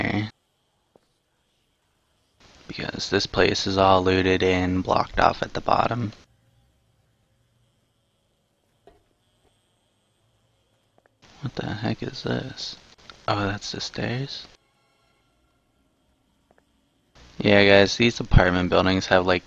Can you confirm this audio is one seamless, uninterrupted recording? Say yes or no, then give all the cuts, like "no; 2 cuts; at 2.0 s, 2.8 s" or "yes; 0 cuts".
no; 1 cut; at 3.8 s